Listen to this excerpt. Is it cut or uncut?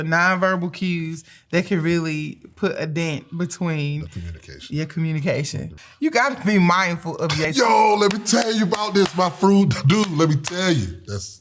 cut